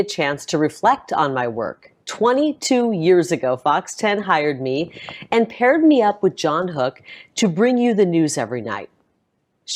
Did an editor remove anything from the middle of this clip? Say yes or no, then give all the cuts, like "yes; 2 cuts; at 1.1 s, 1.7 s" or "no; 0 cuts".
no; 0 cuts